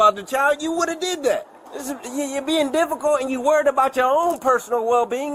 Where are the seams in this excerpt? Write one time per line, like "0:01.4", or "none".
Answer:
none